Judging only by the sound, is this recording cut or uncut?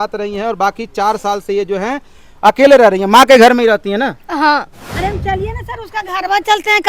cut